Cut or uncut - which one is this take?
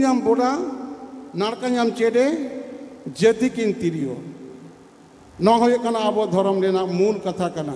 uncut